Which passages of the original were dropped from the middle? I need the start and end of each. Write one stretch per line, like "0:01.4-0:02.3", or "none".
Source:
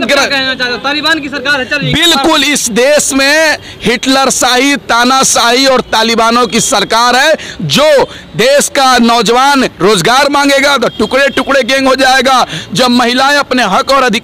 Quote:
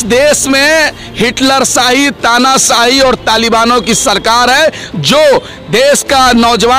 none